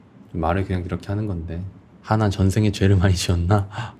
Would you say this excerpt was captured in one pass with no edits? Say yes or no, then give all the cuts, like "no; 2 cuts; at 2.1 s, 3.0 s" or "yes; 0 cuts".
yes; 0 cuts